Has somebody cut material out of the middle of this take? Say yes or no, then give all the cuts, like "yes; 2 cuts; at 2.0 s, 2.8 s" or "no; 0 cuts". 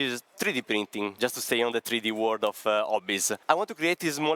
yes; 2 cuts; at 1.1 s, 3.3 s